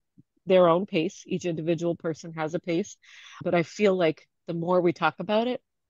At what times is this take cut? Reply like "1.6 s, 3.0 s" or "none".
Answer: 3.4 s